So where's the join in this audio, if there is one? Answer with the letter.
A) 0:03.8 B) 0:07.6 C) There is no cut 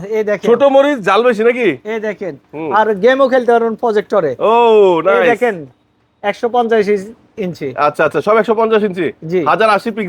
C